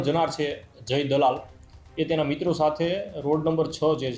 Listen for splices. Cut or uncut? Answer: uncut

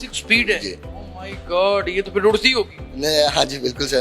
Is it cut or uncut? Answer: uncut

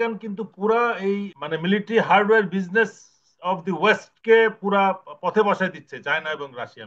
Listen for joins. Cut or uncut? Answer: cut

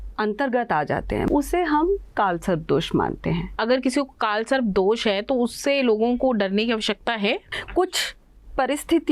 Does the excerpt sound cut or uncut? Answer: cut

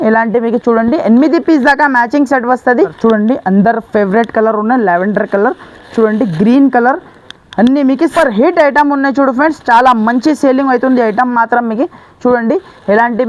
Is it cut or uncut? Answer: cut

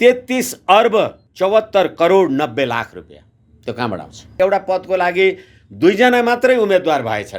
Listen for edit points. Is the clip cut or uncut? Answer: cut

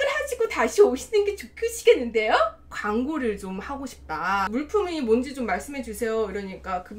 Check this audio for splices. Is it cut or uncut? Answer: cut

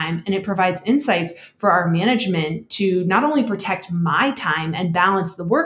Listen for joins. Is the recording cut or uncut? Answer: uncut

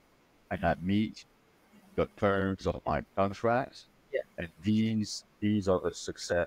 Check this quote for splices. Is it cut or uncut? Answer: uncut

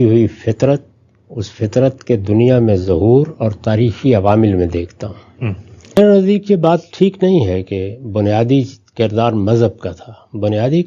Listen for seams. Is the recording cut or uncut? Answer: cut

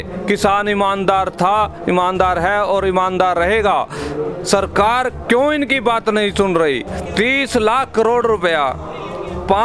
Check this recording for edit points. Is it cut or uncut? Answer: cut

